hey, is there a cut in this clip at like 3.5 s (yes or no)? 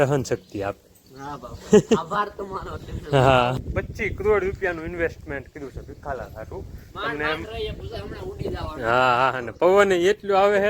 yes